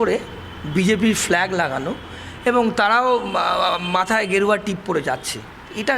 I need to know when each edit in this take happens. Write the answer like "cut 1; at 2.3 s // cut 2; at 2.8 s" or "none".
none

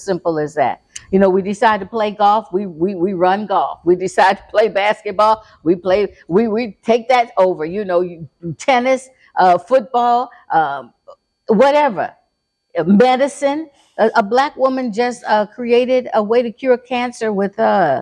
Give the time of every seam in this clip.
none

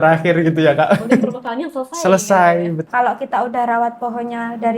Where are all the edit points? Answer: cut 1; at 1.4 s // cut 2; at 2.8 s

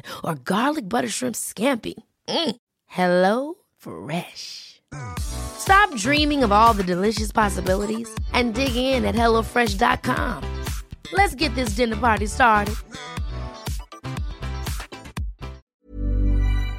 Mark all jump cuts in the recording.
cut 1; at 15.6 s

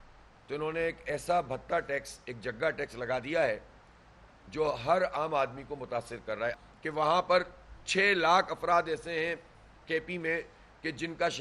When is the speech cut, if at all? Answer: cut 1; at 6.5 s

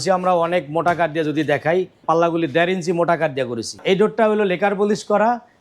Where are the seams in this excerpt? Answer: cut 1; at 2.0 s // cut 2; at 3.8 s

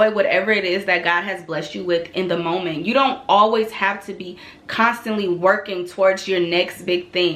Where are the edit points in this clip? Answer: none

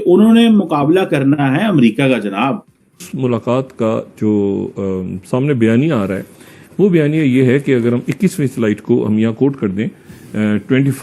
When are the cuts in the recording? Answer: cut 1; at 3.1 s

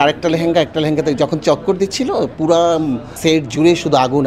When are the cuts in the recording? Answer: cut 1; at 3.1 s

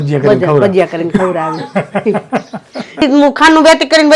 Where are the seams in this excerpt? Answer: cut 1; at 3.0 s

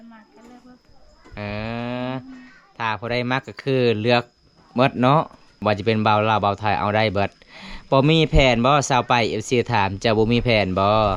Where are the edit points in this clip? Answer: cut 1; at 5.4 s

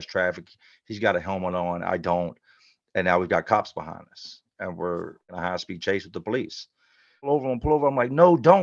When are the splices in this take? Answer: cut 1; at 5.3 s // cut 2; at 7.3 s

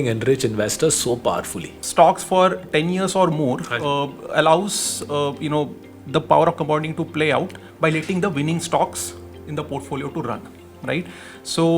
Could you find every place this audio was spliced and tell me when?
cut 1; at 1.8 s

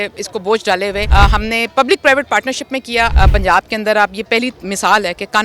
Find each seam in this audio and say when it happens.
cut 1; at 1.1 s // cut 2; at 3.1 s

